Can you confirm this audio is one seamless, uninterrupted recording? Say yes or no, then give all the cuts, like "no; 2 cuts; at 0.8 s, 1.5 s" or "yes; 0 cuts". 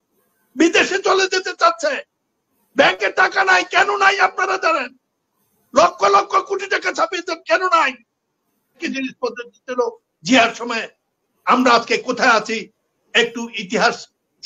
no; 1 cut; at 8.8 s